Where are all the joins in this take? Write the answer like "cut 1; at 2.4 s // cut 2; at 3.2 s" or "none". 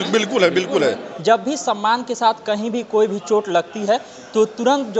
cut 1; at 1.1 s

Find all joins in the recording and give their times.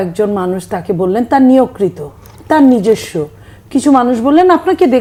none

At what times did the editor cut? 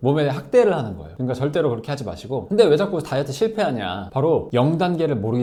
none

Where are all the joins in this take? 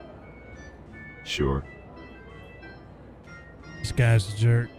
none

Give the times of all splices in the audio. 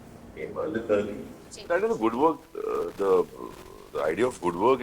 cut 1; at 1.5 s

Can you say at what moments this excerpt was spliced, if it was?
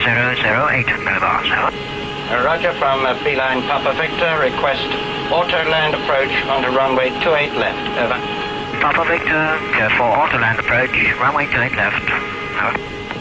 cut 1; at 2.5 s

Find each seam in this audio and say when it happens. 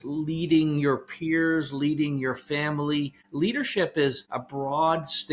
cut 1; at 3.2 s // cut 2; at 4.3 s

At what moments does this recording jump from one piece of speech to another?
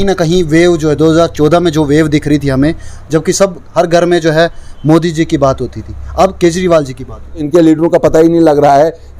cut 1; at 7.5 s

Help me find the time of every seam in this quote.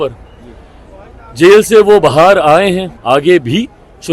cut 1; at 2.9 s

